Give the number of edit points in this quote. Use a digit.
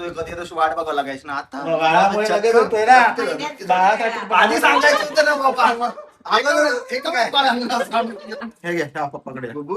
1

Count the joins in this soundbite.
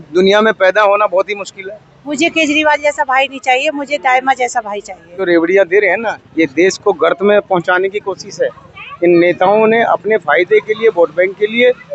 2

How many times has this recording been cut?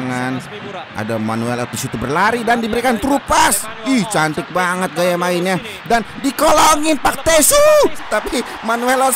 1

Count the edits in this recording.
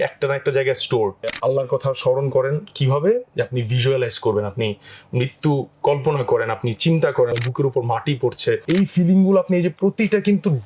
3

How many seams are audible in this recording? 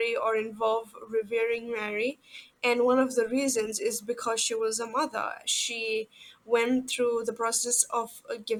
0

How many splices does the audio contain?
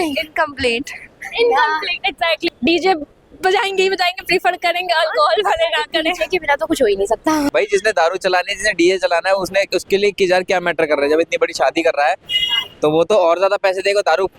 2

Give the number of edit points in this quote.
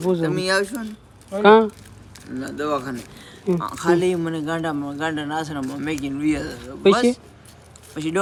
0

